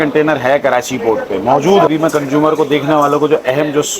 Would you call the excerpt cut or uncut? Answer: cut